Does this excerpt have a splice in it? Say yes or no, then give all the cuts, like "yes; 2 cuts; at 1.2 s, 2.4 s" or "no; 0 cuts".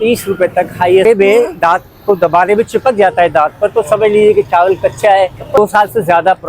yes; 2 cuts; at 1.0 s, 5.6 s